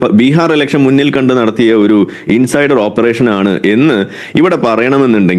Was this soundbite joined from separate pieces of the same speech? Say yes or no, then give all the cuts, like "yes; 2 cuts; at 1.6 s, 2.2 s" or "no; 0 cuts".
no; 0 cuts